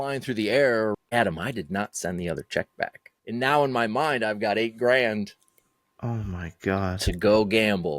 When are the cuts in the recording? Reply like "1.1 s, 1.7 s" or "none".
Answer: 1.0 s, 3.1 s

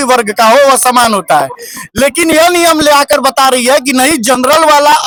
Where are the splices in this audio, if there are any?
none

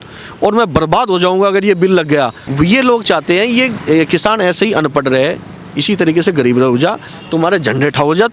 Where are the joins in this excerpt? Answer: 2.4 s

